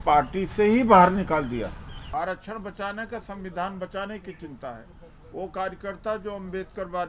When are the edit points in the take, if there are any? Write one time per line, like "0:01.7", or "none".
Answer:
0:02.0